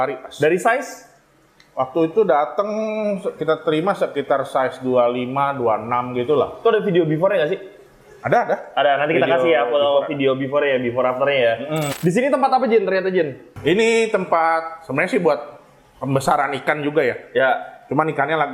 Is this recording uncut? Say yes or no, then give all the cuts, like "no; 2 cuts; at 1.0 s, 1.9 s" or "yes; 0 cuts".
no; 1 cut; at 11.9 s